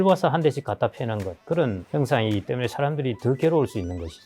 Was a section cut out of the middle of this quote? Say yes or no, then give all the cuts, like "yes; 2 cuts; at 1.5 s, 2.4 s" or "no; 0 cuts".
yes; 1 cut; at 1.5 s